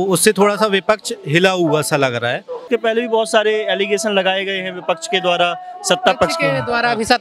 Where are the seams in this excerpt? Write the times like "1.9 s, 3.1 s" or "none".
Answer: 2.6 s